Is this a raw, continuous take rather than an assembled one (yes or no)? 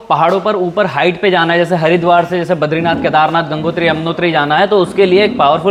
yes